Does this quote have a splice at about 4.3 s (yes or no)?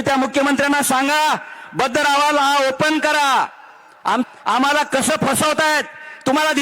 yes